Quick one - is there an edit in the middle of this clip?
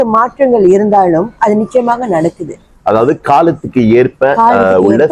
no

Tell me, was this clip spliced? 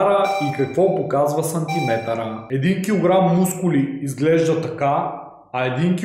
yes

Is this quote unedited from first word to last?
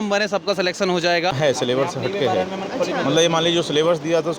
no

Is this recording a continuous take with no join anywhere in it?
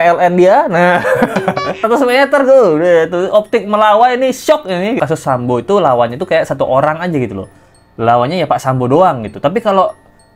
no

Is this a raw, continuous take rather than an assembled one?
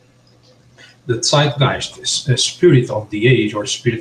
no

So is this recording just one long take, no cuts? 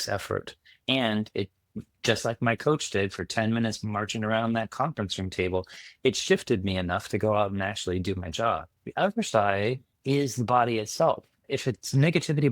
no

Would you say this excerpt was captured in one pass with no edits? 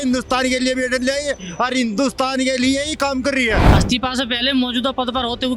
no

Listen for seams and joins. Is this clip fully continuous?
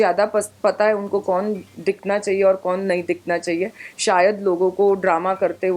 yes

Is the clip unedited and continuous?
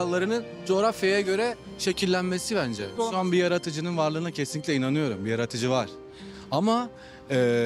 no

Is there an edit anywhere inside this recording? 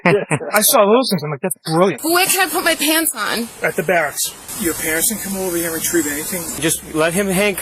yes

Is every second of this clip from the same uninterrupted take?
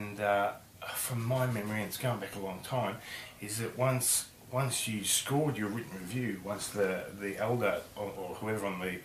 no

